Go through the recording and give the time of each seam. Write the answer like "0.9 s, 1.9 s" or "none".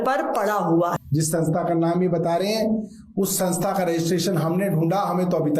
1.0 s